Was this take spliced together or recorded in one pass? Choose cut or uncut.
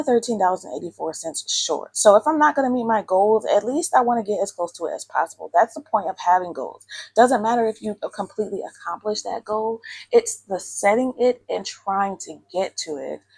uncut